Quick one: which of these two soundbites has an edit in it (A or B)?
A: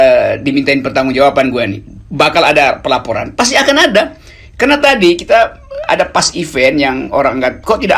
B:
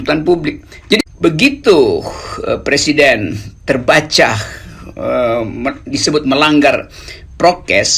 B